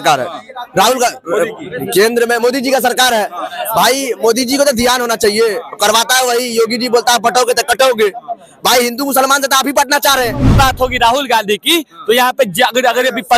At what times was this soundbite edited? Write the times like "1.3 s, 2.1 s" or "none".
10.5 s